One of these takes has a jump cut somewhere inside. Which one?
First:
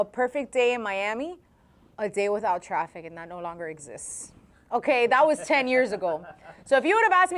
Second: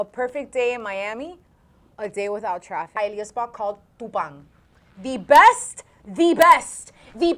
second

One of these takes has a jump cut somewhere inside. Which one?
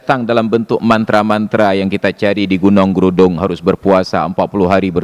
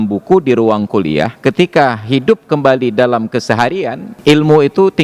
second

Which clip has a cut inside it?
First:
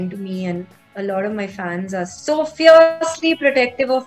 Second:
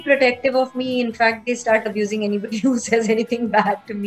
first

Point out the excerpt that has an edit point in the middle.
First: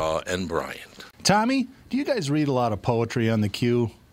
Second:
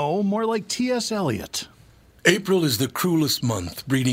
first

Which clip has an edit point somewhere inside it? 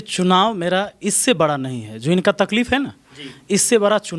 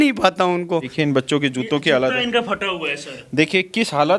second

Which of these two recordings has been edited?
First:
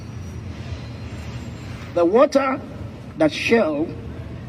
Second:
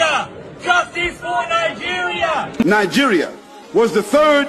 second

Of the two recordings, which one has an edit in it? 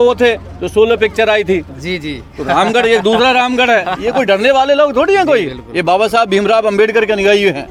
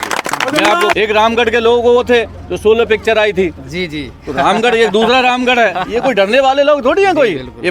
second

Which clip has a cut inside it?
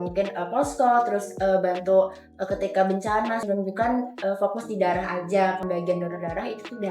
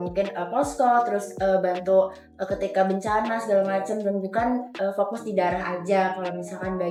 first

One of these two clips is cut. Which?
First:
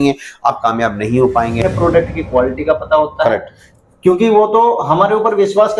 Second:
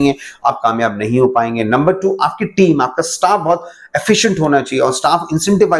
first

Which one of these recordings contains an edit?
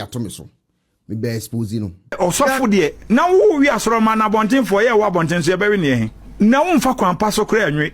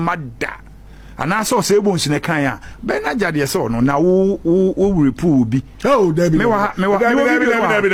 first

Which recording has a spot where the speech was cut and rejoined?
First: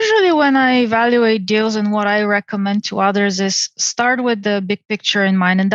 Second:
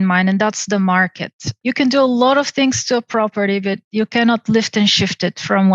second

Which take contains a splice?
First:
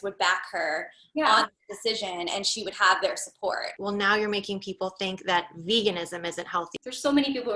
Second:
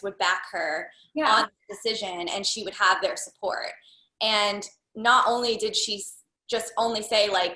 first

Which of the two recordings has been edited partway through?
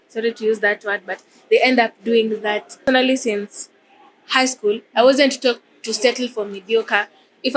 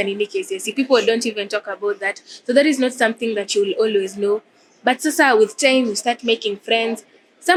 first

